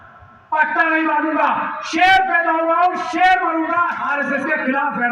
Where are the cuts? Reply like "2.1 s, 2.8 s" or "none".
4.0 s